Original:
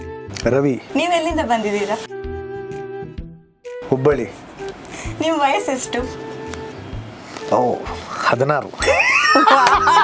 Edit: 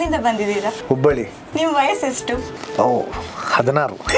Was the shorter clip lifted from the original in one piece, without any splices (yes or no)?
no